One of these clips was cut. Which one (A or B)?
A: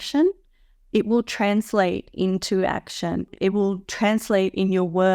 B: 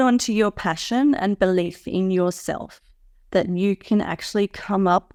A